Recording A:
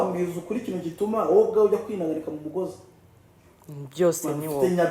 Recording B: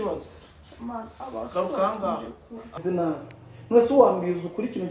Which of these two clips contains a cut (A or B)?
B